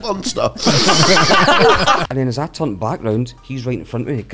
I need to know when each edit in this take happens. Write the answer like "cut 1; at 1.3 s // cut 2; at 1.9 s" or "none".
cut 1; at 2.0 s // cut 2; at 3.4 s